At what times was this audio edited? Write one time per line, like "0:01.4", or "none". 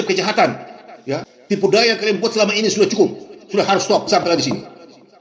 0:01.4